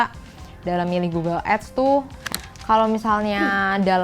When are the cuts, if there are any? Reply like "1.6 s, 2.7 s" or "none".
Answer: 2.2 s